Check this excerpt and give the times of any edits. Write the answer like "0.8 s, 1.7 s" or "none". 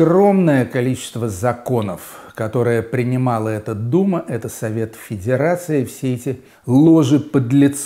6.5 s